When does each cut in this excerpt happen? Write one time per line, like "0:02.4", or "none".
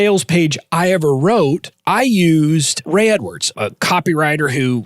0:01.7
0:02.8
0:03.5